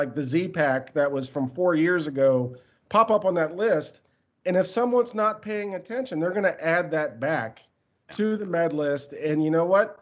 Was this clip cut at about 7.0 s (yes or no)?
no